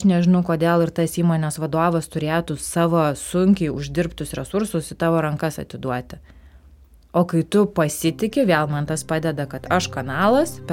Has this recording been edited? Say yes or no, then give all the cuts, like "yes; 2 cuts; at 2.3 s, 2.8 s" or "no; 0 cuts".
no; 0 cuts